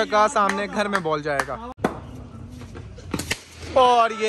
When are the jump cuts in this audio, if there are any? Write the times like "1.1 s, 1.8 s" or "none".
1.7 s